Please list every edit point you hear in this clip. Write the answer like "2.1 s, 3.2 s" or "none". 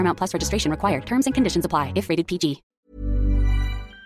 2.7 s